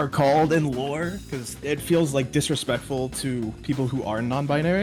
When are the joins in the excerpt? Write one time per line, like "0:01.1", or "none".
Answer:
none